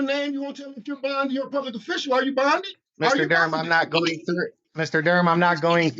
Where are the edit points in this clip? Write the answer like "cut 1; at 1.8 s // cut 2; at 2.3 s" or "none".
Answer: cut 1; at 2.8 s // cut 2; at 4.6 s